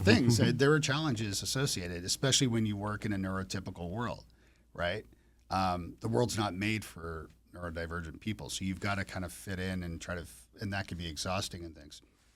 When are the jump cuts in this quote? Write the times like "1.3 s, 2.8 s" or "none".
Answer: none